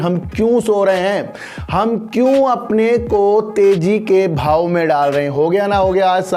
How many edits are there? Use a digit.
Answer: 0